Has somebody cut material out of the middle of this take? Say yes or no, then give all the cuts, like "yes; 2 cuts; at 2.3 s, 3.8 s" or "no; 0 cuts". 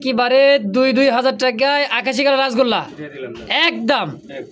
no; 0 cuts